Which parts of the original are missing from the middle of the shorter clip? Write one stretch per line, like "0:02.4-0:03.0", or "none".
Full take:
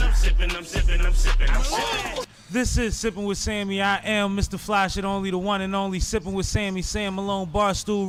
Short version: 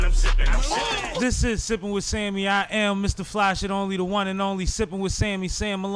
0:02.2-0:02.5